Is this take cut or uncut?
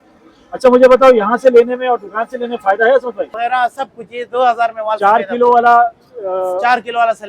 cut